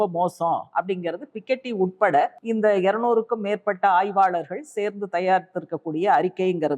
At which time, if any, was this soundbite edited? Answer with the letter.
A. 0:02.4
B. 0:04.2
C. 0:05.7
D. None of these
A